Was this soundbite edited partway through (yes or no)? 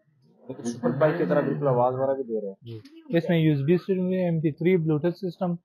no